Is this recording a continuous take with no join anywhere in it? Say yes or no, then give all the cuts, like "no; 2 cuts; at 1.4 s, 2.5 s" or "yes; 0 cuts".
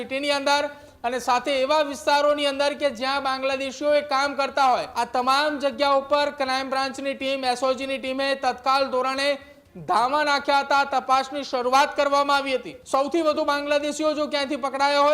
no; 2 cuts; at 4.9 s, 12.7 s